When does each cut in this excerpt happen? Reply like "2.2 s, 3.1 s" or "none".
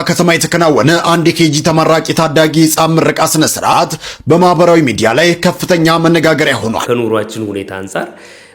6.8 s